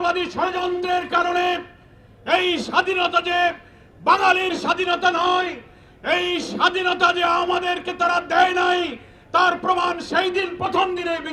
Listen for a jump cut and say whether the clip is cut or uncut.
uncut